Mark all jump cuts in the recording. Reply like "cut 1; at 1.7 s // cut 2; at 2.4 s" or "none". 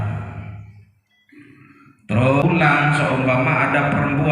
cut 1; at 2.4 s